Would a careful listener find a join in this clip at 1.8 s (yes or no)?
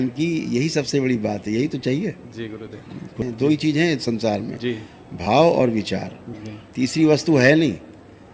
no